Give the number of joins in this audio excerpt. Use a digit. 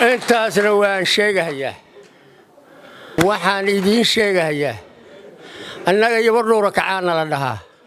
1